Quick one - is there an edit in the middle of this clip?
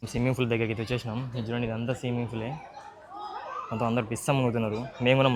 no; 0 cuts

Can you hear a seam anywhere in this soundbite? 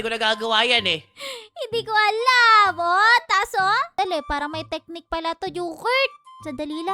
yes; 1 cut; at 3.9 s

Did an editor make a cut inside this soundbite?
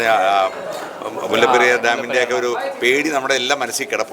no; 0 cuts

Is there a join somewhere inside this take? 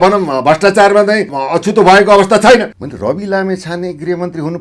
yes; 2 cuts; at 1.4 s, 2.8 s

